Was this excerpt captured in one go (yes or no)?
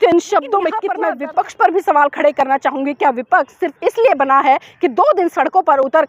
no